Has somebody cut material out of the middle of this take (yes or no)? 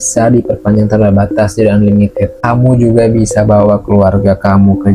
no